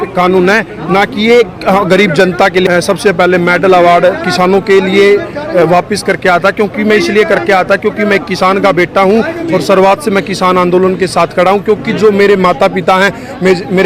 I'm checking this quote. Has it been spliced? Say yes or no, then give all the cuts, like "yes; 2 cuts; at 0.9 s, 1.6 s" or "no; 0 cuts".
yes; 1 cut; at 2.7 s